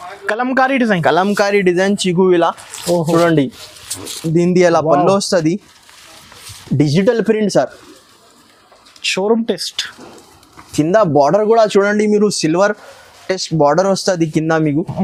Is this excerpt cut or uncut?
uncut